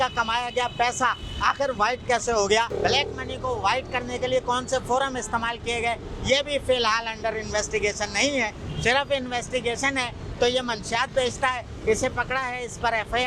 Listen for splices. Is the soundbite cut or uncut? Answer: uncut